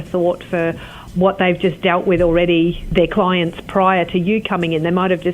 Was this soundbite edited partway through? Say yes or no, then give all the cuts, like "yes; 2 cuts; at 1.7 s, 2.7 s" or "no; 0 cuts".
yes; 2 cuts; at 1.0 s, 2.8 s